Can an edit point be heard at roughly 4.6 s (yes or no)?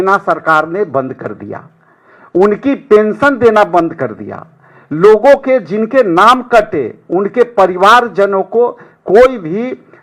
no